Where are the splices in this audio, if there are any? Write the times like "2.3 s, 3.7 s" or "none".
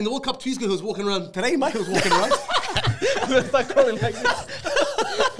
none